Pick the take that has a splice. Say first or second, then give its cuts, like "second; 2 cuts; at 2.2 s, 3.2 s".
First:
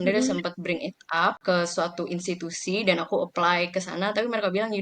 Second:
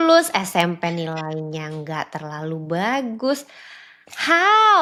first; 1 cut; at 1.4 s